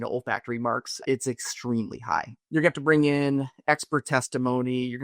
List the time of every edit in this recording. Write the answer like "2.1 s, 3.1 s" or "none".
1.0 s, 2.4 s